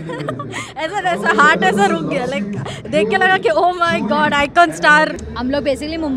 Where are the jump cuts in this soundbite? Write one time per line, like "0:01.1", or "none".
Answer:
0:05.2

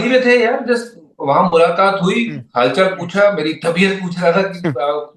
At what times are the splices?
none

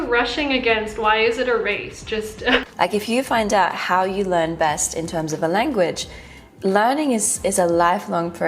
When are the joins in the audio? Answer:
0:02.4

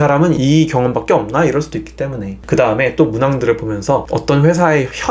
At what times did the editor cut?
0:02.3

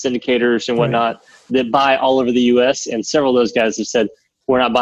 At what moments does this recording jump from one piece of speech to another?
0:01.5

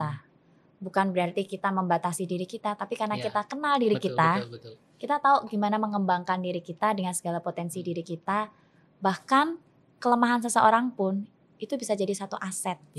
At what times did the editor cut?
none

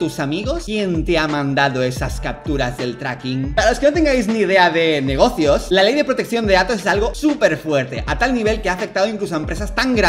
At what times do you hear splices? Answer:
none

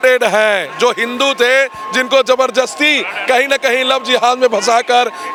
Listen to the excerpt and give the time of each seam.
none

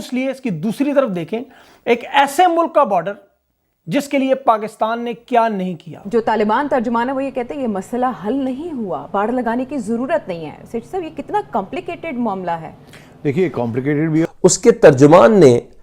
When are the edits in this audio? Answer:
0:05.9
0:14.3

